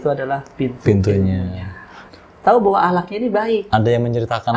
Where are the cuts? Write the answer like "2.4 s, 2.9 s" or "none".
1.9 s